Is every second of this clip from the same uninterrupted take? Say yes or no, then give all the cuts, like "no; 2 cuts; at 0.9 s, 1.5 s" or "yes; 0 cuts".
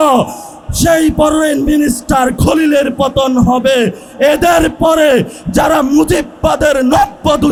yes; 0 cuts